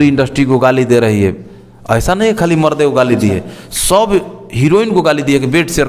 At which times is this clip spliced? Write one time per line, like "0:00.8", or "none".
none